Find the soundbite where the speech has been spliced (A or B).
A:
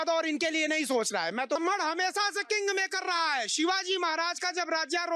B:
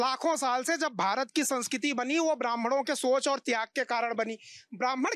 A